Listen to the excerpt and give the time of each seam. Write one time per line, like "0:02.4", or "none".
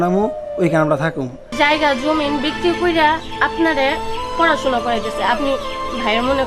0:01.5